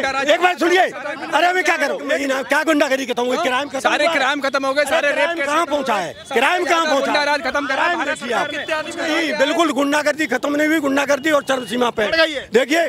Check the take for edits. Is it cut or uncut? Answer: cut